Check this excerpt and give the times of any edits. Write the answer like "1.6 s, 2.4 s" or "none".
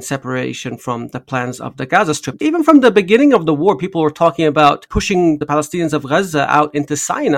2.3 s, 5.3 s

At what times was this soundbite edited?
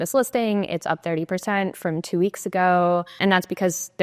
3.1 s

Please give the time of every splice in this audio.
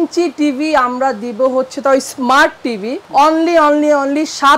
none

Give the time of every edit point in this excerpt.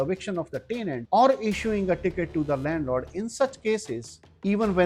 1.0 s

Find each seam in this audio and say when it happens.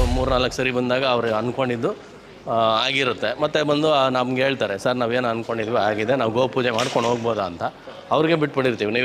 none

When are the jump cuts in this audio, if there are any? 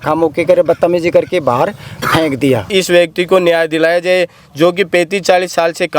2.7 s

